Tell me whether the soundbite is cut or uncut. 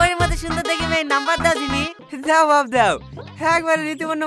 cut